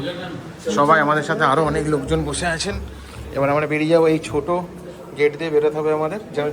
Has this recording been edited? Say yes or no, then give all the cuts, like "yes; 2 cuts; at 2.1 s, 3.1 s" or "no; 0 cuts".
no; 0 cuts